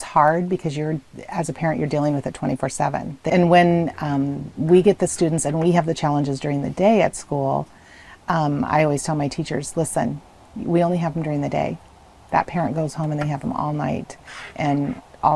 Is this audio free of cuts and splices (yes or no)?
no